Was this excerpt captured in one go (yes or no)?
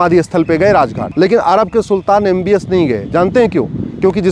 no